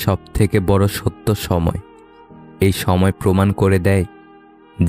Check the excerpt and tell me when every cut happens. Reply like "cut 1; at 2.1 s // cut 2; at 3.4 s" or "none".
none